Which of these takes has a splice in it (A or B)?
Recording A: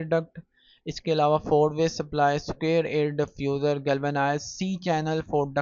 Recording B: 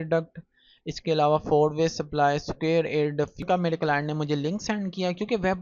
B